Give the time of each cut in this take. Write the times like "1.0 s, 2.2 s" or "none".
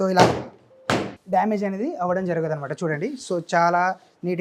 none